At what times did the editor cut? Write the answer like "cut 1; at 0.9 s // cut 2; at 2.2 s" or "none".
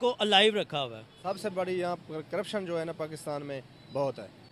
cut 1; at 1.1 s